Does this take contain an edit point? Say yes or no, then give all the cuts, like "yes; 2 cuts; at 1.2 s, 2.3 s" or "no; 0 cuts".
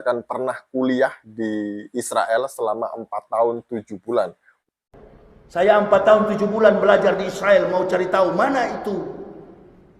yes; 1 cut; at 4.5 s